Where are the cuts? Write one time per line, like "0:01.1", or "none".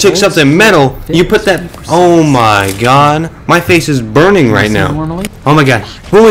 0:05.2